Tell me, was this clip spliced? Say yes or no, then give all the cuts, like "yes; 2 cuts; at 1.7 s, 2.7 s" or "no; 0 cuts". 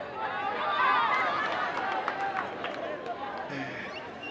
no; 0 cuts